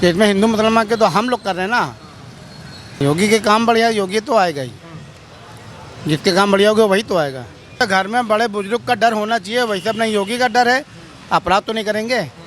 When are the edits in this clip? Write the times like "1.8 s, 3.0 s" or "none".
3.0 s, 7.8 s